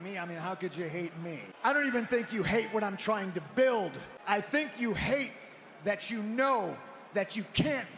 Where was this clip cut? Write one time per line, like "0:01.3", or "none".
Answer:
0:01.5
0:04.1

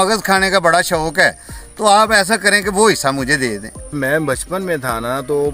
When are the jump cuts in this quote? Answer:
0:03.9

